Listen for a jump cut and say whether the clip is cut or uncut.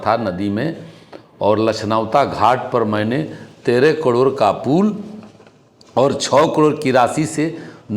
uncut